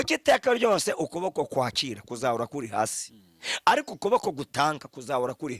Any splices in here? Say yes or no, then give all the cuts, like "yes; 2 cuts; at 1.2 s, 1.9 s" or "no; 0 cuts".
no; 0 cuts